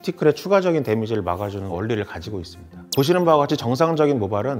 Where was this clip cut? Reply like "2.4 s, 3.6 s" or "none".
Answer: none